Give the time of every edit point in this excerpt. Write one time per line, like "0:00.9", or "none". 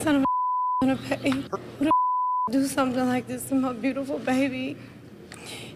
0:01.5